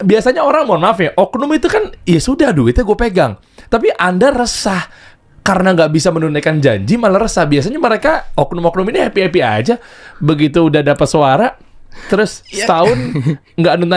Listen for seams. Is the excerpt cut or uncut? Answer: uncut